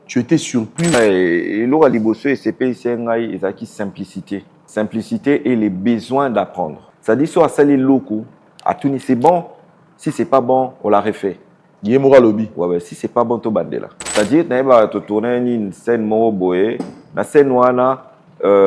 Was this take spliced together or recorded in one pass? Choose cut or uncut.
cut